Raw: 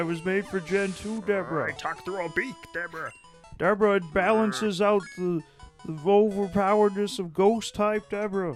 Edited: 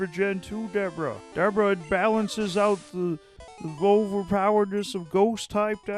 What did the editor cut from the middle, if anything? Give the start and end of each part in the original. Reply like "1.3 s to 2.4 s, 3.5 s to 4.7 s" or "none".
1.8 s to 3.5 s